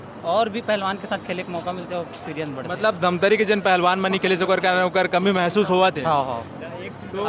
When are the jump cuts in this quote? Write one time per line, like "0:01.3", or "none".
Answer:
none